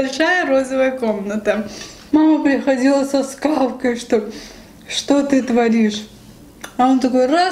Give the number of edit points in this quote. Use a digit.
1